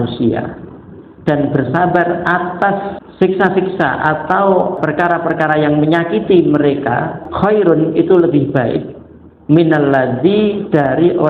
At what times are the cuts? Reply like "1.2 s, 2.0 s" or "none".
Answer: 3.0 s, 4.8 s, 7.2 s